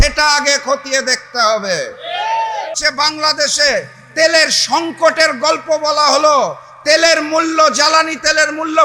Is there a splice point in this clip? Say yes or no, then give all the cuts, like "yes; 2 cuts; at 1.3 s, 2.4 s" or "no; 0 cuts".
yes; 1 cut; at 2.8 s